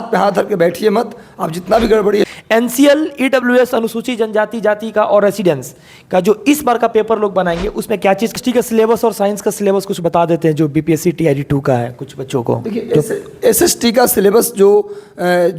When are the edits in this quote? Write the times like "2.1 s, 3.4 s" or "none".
2.3 s, 8.4 s